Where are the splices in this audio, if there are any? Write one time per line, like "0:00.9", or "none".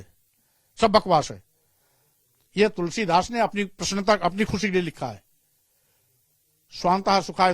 none